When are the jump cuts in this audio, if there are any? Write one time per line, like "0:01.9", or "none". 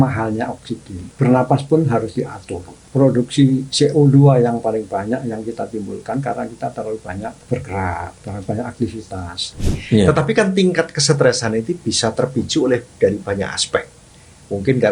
0:01.0
0:02.8
0:07.4
0:08.2
0:09.7

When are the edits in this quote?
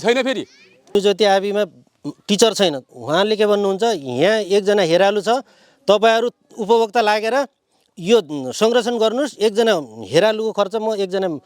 0:01.0

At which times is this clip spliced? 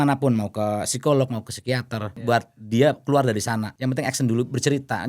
0:02.1
0:03.7

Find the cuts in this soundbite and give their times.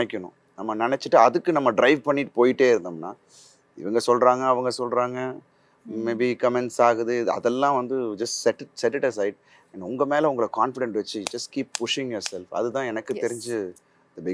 none

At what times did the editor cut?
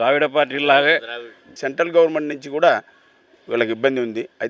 0:01.5

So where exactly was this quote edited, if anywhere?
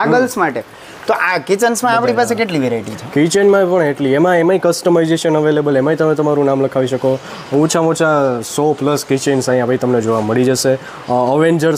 none

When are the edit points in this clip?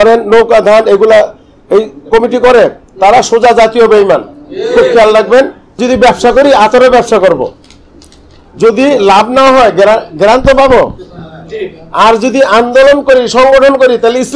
0:05.8

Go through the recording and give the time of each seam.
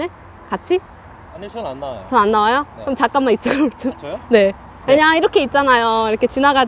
0:04.7

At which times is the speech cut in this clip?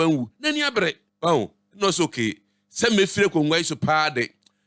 0:01.1

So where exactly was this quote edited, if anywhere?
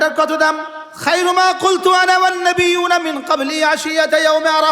none

